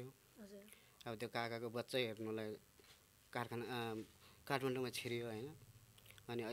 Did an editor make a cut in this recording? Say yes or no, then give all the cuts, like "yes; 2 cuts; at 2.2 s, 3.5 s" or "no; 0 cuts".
no; 0 cuts